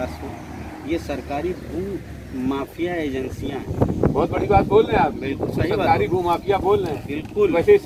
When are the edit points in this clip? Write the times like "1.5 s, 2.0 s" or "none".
none